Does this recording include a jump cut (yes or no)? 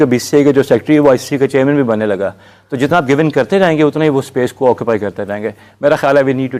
no